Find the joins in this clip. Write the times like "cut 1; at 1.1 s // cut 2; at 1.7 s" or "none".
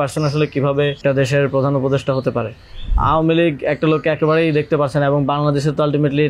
cut 1; at 1.0 s // cut 2; at 2.9 s